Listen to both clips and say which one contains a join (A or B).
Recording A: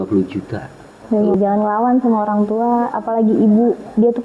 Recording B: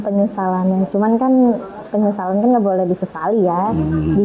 A